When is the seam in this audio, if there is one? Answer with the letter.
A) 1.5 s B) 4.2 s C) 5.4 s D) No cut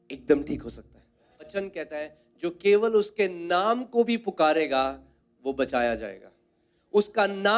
A